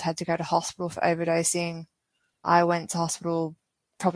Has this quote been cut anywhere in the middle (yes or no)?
yes